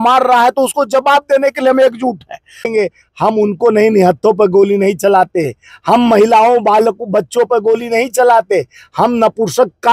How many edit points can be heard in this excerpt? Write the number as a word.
one